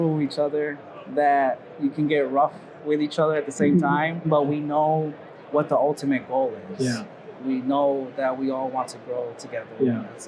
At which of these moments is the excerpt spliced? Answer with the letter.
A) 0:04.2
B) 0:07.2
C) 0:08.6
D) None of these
A